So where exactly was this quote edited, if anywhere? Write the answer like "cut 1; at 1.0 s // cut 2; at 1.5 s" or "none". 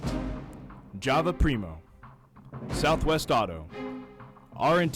none